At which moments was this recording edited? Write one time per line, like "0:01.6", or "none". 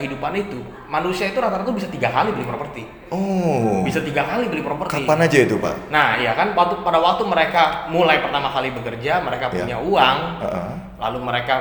none